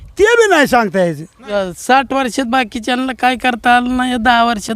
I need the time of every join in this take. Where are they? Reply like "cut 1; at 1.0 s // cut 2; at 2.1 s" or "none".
cut 1; at 1.4 s

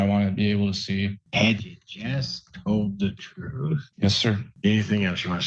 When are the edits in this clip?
cut 1; at 1.2 s // cut 2; at 3.9 s

